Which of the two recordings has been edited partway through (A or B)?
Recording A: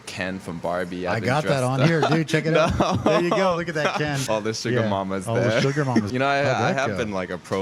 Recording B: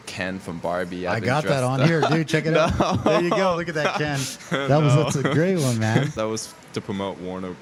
A